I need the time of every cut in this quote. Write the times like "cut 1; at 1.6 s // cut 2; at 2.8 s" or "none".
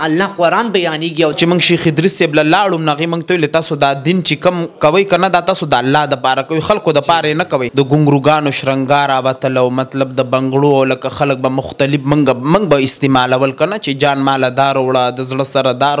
cut 1; at 1.3 s // cut 2; at 7.7 s